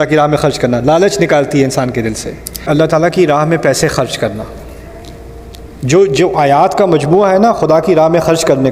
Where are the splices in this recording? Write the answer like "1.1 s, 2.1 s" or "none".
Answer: 2.7 s

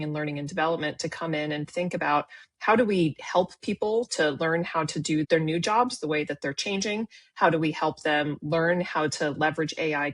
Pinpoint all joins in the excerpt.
5.3 s

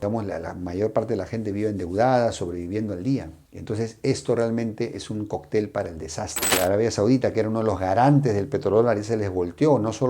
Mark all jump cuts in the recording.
6.5 s

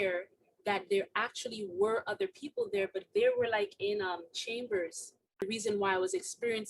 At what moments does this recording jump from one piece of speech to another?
5.4 s

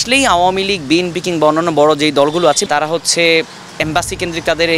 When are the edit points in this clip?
2.6 s

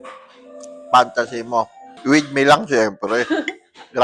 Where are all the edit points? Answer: 1.8 s

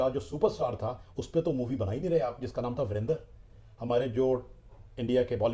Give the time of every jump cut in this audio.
none

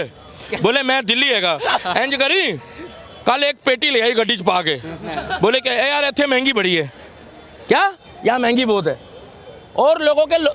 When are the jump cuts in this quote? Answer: none

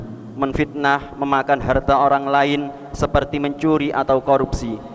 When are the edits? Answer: none

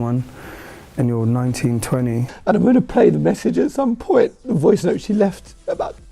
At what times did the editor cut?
2.3 s

